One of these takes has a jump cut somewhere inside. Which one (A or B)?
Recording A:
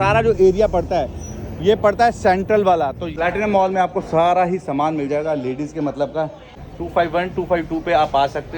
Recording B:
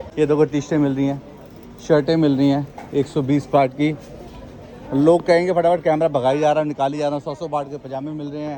A